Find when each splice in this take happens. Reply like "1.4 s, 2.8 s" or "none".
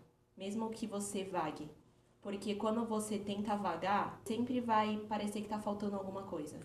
4.2 s